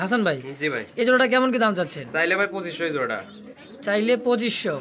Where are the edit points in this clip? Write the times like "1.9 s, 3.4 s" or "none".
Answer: none